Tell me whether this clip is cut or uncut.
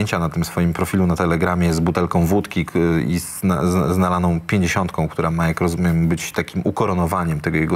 uncut